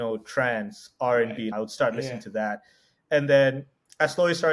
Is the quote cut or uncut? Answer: cut